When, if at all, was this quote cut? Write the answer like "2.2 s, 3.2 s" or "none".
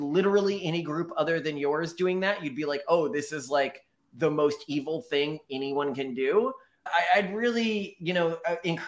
none